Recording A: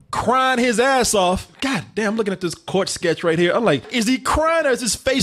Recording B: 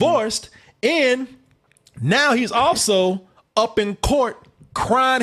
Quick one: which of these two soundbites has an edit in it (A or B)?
A